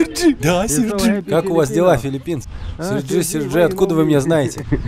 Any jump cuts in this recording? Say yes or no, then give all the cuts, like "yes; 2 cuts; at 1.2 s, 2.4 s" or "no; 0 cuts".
no; 0 cuts